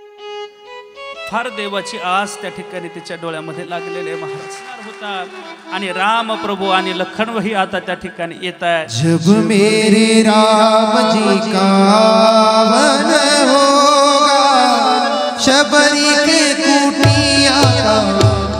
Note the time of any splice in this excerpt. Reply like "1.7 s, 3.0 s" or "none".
5.0 s